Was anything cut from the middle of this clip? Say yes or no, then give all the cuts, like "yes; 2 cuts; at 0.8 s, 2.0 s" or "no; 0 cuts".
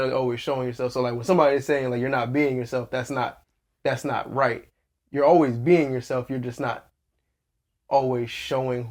no; 0 cuts